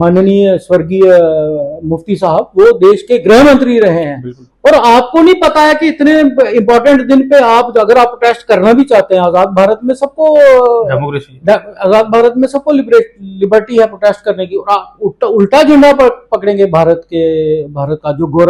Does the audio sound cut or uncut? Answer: uncut